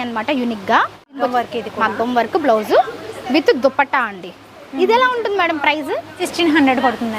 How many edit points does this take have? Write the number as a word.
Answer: two